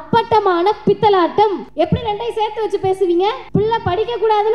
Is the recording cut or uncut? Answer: cut